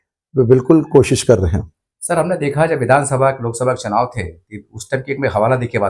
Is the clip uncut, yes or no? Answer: yes